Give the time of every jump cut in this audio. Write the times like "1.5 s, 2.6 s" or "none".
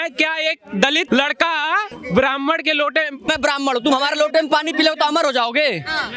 1.0 s, 1.9 s, 3.3 s